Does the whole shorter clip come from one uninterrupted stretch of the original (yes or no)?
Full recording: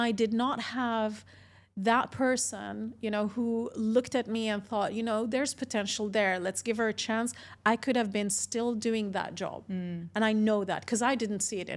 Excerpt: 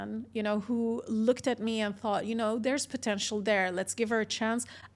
yes